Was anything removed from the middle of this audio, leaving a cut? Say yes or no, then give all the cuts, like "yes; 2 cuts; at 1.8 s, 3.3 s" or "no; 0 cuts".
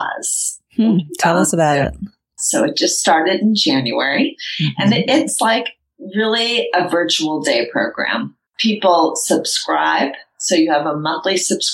no; 0 cuts